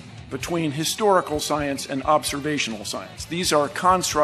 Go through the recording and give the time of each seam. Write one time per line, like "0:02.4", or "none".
none